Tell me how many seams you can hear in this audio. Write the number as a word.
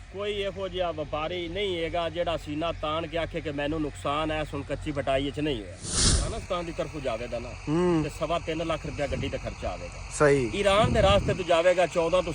one